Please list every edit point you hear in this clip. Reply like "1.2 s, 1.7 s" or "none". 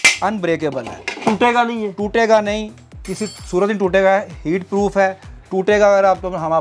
none